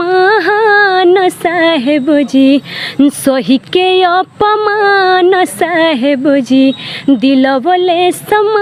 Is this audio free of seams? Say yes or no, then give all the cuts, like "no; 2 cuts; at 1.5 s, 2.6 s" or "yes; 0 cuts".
yes; 0 cuts